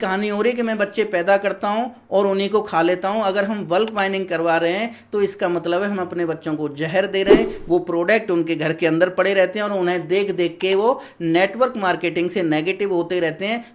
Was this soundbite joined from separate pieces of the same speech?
no; 0 cuts

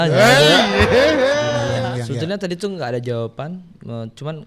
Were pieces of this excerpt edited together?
yes; 1 cut; at 1.6 s

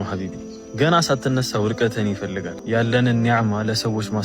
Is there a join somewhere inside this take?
yes; 1 cut; at 2.5 s

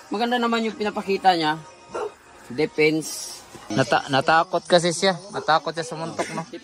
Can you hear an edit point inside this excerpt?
yes; 1 cut; at 3.6 s

